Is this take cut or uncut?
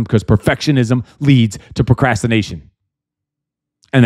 uncut